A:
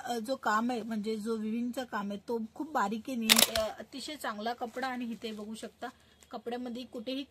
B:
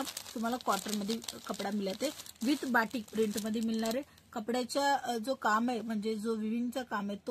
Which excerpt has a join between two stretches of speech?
A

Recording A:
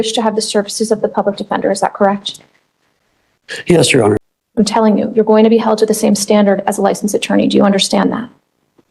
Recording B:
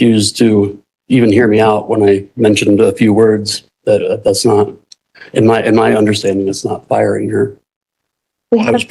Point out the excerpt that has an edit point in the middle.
A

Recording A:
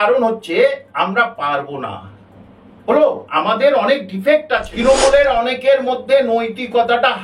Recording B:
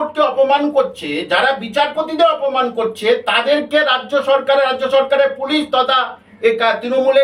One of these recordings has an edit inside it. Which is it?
A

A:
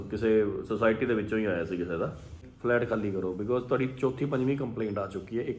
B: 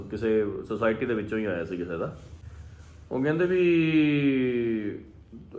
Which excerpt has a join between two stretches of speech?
A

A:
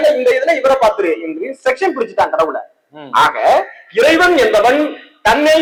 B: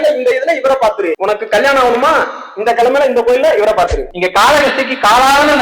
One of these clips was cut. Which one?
B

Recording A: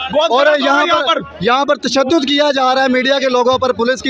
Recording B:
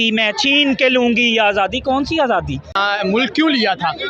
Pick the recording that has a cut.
B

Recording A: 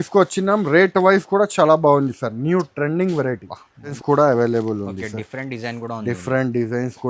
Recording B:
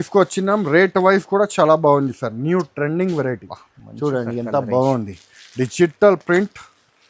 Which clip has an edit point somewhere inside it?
A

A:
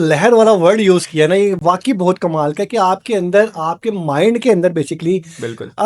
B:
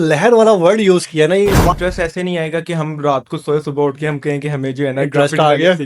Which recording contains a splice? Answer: B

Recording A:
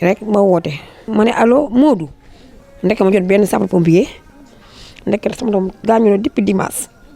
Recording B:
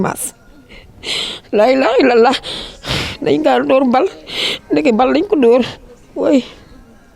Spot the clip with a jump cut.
A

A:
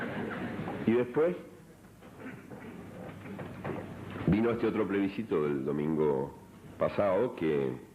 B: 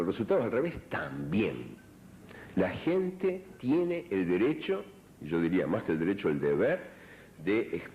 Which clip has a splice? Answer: A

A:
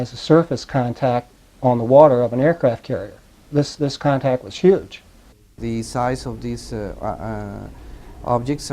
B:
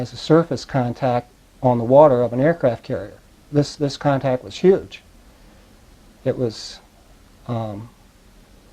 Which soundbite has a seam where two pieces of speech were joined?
A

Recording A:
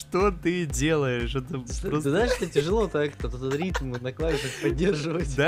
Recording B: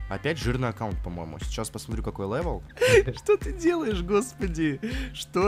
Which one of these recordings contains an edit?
B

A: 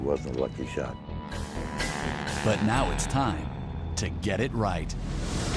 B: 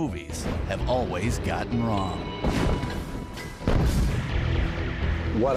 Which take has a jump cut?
A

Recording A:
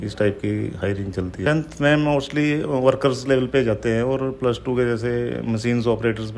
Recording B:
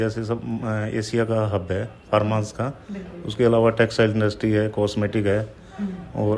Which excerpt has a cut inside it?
A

